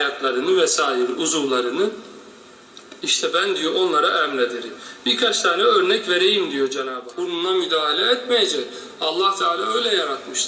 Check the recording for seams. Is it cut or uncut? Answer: cut